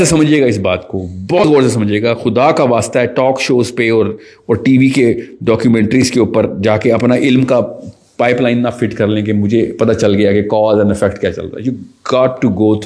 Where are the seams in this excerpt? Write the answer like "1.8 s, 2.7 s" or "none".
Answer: 1.4 s